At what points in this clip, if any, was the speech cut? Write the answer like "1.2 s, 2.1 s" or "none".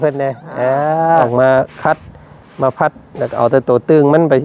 1.3 s